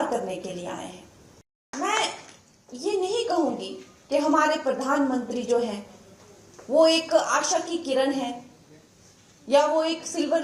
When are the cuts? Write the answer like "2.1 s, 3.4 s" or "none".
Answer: 1.7 s